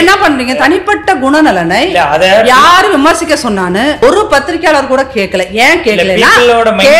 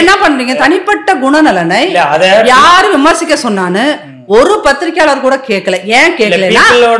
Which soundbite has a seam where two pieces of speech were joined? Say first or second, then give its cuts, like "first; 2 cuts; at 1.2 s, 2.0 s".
first; 1 cut; at 4.0 s